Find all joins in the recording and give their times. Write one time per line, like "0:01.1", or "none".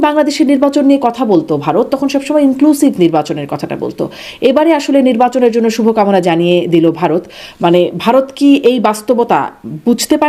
none